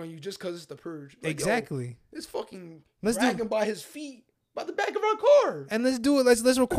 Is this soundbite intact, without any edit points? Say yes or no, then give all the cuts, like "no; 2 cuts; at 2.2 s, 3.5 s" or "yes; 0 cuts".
yes; 0 cuts